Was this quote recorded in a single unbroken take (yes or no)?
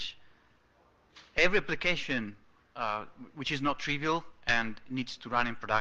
yes